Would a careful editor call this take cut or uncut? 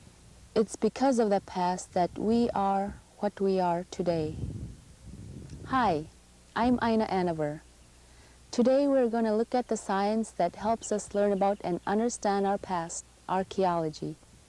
cut